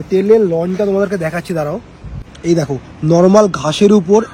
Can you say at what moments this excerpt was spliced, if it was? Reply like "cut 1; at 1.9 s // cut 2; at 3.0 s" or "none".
none